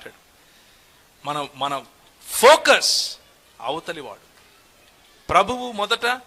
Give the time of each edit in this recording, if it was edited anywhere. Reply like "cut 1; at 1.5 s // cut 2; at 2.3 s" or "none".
none